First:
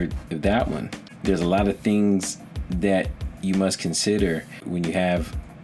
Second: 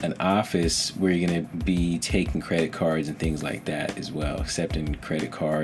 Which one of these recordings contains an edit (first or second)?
first